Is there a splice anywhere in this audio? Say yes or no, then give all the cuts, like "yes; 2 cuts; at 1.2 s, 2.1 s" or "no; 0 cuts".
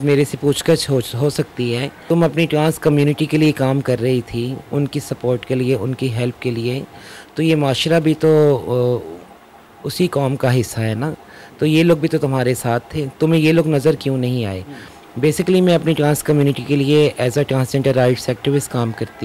no; 0 cuts